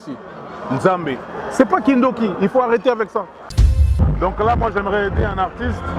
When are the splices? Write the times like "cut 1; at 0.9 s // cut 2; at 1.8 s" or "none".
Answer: cut 1; at 3.6 s